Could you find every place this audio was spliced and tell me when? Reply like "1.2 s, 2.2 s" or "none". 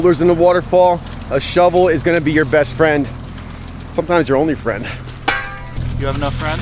none